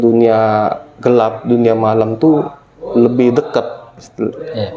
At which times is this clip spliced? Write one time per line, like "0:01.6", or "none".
none